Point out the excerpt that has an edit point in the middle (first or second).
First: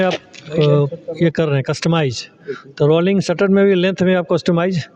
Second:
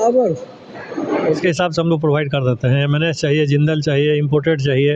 second